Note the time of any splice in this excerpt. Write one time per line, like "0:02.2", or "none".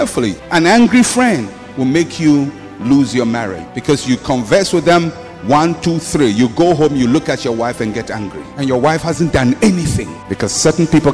0:10.2